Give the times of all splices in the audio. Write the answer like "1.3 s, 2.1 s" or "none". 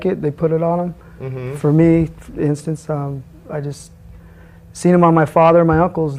2.2 s